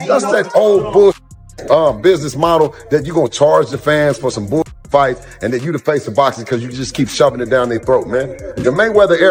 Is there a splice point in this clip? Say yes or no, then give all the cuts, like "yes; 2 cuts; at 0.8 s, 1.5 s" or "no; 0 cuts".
no; 0 cuts